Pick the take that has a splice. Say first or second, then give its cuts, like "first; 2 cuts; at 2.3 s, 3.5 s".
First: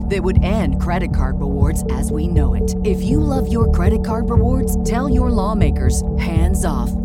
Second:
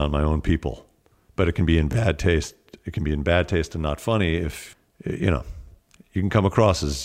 second; 1 cut; at 4.6 s